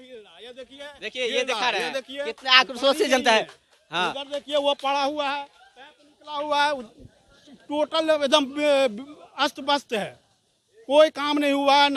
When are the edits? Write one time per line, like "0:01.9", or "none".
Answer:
none